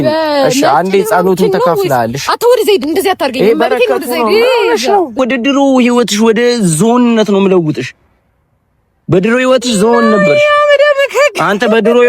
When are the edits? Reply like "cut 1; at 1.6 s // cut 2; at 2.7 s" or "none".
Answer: cut 1; at 5.2 s